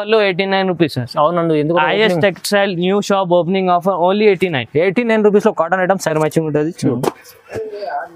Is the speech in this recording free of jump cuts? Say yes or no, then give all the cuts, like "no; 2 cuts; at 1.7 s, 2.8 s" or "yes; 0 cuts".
no; 1 cut; at 6.1 s